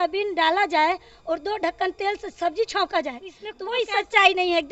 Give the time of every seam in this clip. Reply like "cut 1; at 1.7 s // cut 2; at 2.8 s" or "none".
cut 1; at 3.5 s